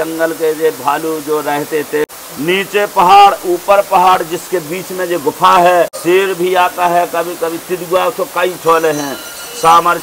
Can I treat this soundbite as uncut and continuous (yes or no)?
no